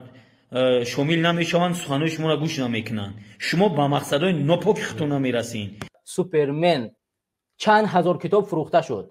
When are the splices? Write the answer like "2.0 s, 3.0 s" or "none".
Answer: 6.0 s, 7.0 s